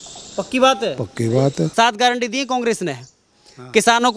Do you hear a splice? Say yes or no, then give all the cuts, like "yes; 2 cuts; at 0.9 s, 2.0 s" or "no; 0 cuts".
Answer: yes; 1 cut; at 1.7 s